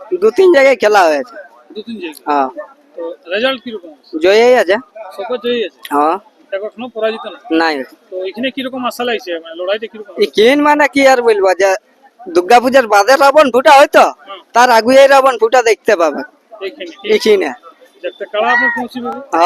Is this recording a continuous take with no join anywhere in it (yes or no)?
yes